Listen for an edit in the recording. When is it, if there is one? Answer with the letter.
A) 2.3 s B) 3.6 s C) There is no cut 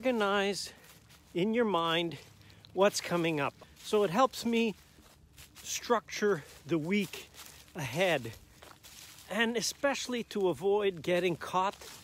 B